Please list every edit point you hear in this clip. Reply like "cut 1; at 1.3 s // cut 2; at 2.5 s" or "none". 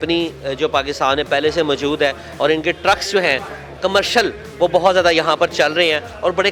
none